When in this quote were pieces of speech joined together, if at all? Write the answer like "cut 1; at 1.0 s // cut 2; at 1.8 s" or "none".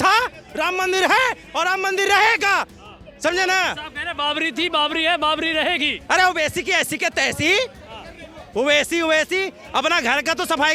none